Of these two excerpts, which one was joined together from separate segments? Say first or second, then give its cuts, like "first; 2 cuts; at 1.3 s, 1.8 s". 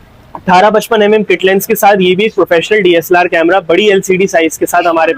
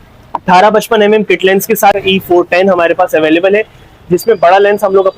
second; 1 cut; at 1.9 s